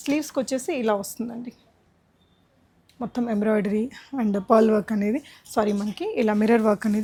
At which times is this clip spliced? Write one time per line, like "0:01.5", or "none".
none